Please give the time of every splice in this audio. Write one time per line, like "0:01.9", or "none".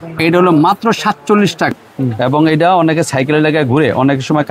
0:01.8